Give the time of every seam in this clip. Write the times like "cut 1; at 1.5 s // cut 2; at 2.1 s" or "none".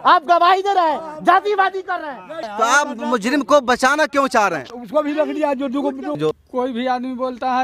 cut 1; at 2.4 s // cut 2; at 6.3 s